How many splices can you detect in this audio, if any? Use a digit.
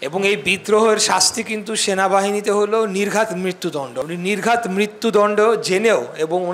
1